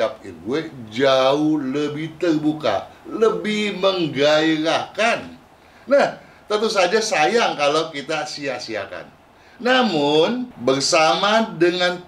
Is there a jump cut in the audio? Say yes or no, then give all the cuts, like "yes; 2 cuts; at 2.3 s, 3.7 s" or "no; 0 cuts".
yes; 1 cut; at 10.5 s